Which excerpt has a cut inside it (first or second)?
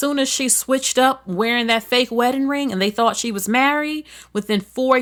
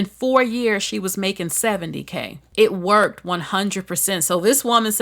second